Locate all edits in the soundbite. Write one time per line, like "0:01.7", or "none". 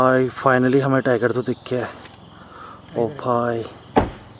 none